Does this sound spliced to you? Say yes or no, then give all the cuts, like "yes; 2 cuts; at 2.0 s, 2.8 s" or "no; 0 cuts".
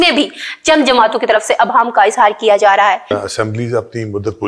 yes; 1 cut; at 3.1 s